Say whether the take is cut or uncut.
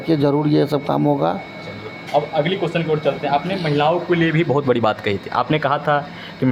uncut